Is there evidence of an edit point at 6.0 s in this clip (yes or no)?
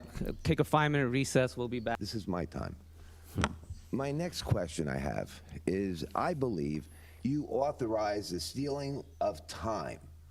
no